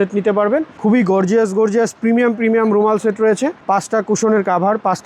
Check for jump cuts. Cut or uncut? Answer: uncut